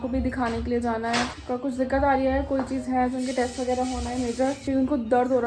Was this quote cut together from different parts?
yes; 2 cuts; at 1.4 s, 4.6 s

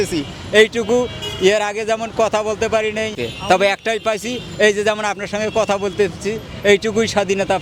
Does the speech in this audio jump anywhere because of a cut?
yes; 1 cut; at 3.3 s

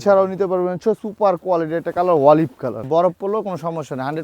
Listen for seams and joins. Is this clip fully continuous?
no; 2 cuts; at 1.1 s, 2.8 s

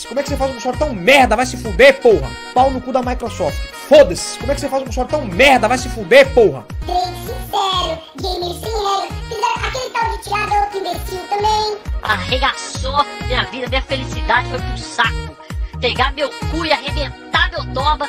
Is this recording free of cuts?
yes; 0 cuts

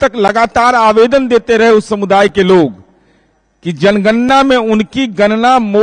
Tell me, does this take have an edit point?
no; 0 cuts

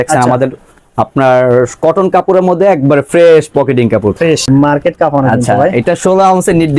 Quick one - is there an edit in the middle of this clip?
yes; 1 cut; at 4.5 s

